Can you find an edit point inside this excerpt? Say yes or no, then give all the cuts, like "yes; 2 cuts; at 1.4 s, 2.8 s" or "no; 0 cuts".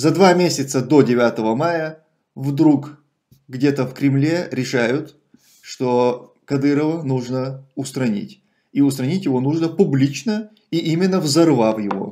no; 0 cuts